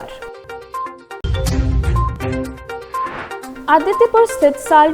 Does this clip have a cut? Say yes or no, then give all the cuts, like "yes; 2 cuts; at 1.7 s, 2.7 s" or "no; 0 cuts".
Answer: no; 0 cuts